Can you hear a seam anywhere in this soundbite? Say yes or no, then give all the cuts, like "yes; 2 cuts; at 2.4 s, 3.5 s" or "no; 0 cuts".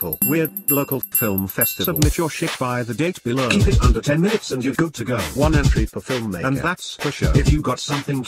yes; 1 cut; at 1.8 s